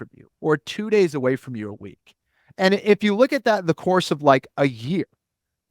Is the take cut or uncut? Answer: uncut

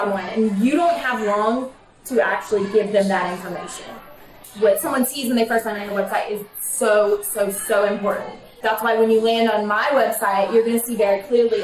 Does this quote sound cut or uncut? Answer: cut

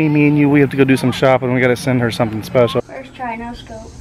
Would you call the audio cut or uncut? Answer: cut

